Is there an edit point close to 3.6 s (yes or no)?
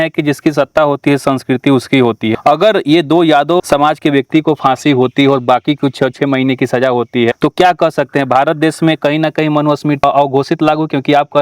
yes